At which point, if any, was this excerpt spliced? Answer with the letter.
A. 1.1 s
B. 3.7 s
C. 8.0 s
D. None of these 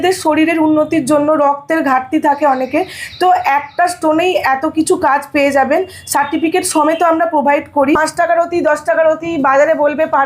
C